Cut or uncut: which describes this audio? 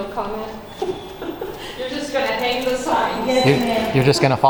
uncut